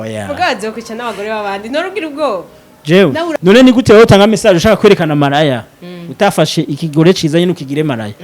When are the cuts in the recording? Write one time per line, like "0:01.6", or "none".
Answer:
0:03.3

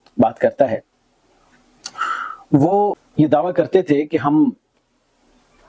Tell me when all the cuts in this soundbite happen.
0:03.0

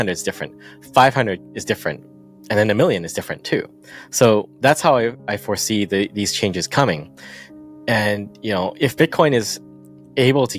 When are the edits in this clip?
none

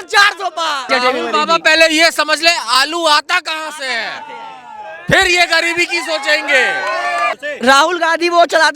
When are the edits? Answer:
0:00.9
0:07.4

